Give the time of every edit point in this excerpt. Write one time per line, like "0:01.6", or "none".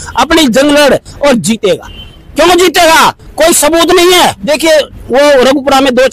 0:04.4